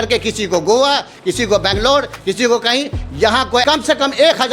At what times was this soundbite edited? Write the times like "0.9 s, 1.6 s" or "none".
3.6 s